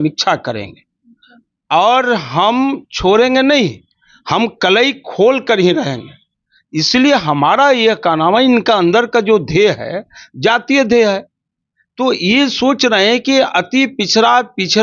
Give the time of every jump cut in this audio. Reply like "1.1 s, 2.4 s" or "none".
none